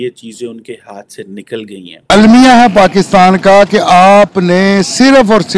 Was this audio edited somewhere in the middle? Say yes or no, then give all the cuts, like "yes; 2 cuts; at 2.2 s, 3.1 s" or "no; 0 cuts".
yes; 1 cut; at 2.1 s